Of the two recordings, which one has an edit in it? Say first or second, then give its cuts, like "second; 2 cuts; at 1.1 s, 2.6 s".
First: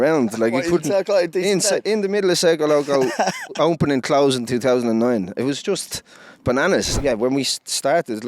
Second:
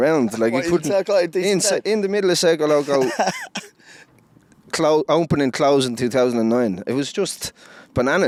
first; 2 cuts; at 3.5 s, 6.9 s